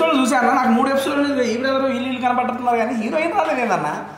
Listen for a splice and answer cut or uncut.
uncut